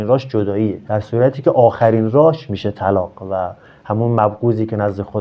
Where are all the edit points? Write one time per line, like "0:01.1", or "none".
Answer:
none